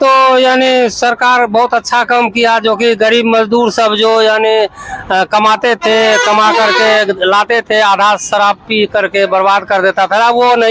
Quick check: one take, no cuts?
yes; 0 cuts

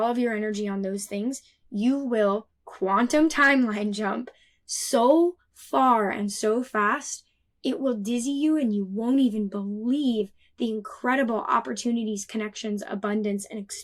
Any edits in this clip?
no; 0 cuts

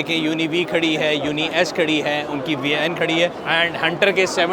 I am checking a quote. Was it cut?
yes; 1 cut; at 3.4 s

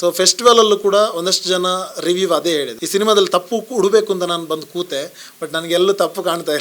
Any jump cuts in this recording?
yes; 1 cut; at 2.8 s

